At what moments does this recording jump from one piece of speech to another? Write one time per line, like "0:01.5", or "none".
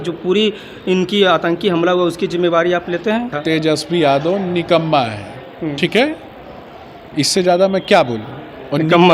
0:03.4

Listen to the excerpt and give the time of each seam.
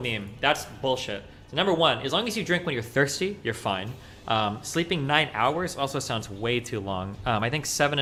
none

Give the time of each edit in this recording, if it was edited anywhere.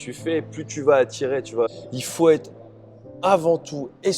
0:01.7

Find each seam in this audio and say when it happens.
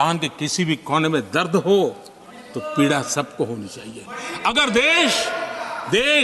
none

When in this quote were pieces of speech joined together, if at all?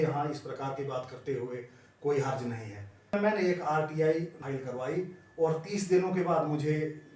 0:03.1
0:04.4

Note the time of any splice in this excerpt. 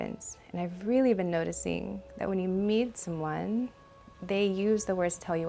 none

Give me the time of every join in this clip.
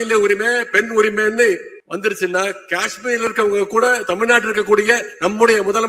0:01.8

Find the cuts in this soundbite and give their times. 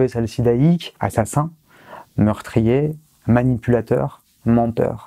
0:00.9

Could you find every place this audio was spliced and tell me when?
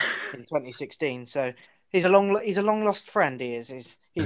0:01.7

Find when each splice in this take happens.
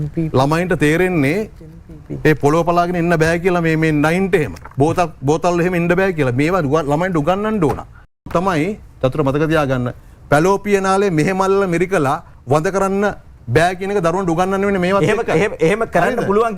0:04.6
0:08.3

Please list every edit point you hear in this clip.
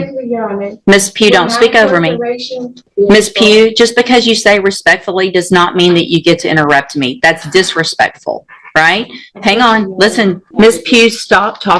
0:02.8
0:10.4

